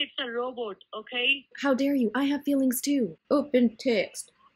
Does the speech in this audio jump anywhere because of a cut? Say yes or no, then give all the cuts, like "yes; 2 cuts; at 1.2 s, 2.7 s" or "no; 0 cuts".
yes; 2 cuts; at 1.5 s, 3.2 s